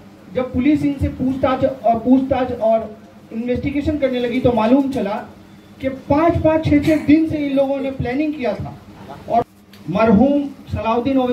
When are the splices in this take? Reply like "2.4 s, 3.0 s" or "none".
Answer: 9.4 s